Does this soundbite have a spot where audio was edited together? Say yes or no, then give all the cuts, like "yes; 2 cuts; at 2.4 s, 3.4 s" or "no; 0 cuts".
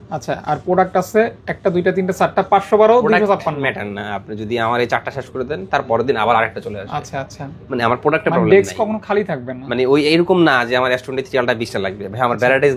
no; 0 cuts